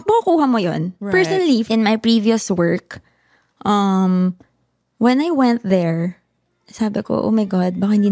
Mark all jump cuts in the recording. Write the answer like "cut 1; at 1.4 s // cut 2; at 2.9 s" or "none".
cut 1; at 1.7 s